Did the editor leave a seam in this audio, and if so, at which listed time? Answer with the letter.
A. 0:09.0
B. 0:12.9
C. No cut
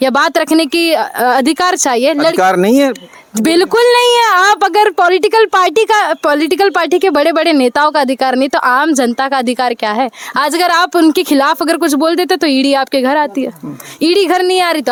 C